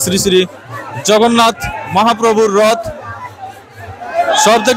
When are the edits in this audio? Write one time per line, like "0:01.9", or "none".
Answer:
none